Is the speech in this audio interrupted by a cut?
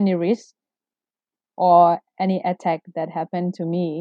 no; 0 cuts

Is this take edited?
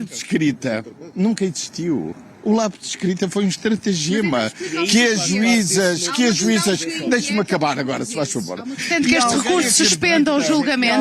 yes; 1 cut; at 8.8 s

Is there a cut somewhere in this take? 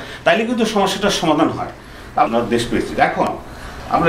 yes; 1 cut; at 2.3 s

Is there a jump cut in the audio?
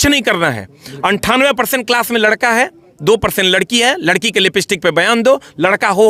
no; 0 cuts

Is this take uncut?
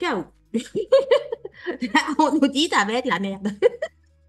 yes; 0 cuts

